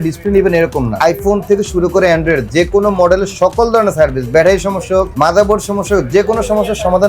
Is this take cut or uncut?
cut